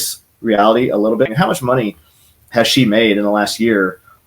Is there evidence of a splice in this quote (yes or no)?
yes